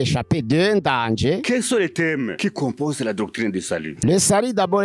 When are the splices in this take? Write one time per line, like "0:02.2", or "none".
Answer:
0:01.4
0:02.3
0:03.9

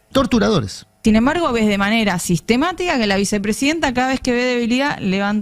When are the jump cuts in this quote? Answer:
0:01.0

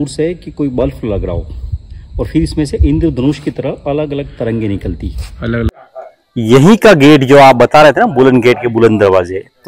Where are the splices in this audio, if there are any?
0:05.7

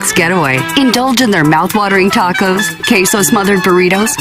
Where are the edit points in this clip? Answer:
none

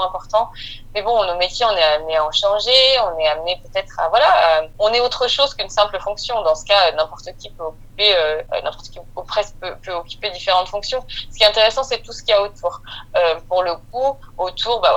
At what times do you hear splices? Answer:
none

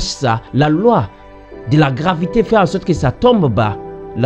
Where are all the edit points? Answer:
none

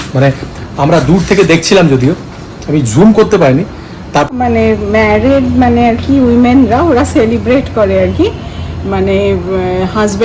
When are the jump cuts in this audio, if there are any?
0:04.3

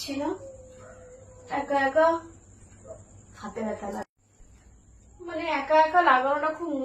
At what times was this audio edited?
0:04.0

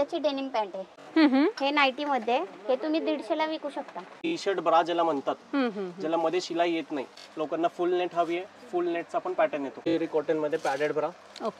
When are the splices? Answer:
0:01.0
0:04.3
0:07.2
0:09.9

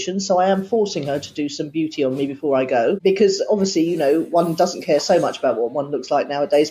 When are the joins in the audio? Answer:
0:03.0

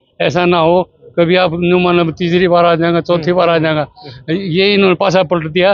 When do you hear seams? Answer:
none

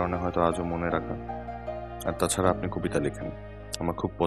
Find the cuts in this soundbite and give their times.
0:01.5

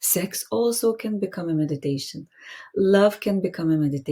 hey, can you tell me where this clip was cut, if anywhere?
none

